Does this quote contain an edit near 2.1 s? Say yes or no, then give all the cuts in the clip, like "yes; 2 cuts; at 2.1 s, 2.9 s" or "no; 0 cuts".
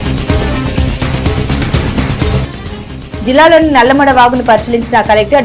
no; 0 cuts